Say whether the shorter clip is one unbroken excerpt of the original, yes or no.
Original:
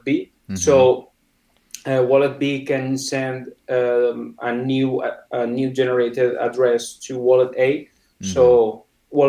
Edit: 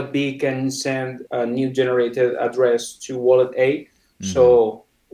no